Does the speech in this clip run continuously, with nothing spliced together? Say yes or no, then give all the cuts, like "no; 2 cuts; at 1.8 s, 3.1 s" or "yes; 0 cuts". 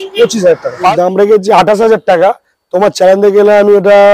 no; 1 cut; at 0.9 s